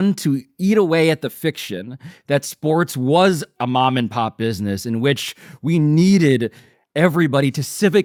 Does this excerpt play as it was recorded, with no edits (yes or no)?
yes